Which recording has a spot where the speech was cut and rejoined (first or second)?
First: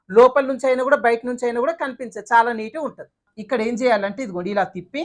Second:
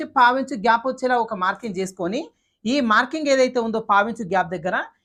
first